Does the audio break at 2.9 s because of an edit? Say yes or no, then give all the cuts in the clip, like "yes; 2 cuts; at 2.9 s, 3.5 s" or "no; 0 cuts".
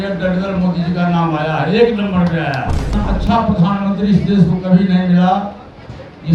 yes; 1 cut; at 2.9 s